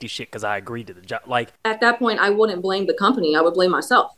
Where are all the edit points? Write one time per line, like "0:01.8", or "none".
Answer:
0:01.6